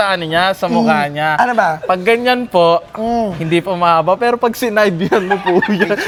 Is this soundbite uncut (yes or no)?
yes